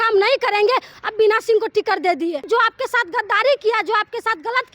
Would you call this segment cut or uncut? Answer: cut